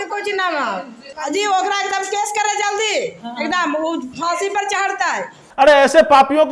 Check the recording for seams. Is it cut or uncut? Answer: cut